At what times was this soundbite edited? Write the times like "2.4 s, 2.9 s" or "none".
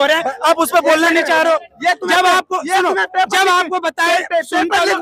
none